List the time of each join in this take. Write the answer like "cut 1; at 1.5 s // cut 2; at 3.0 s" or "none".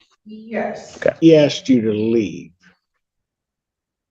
cut 1; at 1.2 s